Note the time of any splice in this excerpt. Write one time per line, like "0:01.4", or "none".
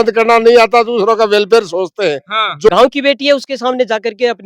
0:02.7